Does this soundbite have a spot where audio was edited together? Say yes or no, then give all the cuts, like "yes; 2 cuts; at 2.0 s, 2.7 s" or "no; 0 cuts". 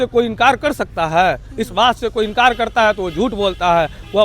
no; 0 cuts